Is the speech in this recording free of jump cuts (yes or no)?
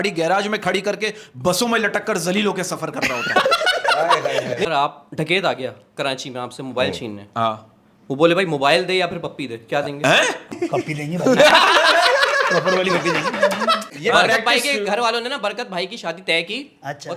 no